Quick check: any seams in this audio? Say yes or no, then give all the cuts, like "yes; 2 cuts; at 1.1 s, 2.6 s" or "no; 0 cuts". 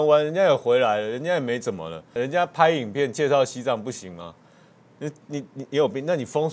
yes; 1 cut; at 2.1 s